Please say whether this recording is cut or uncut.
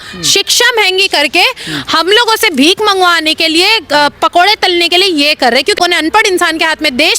cut